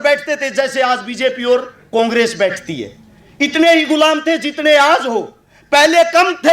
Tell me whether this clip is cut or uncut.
uncut